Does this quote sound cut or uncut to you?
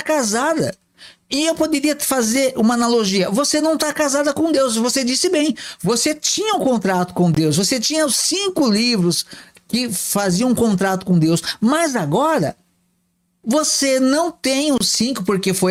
uncut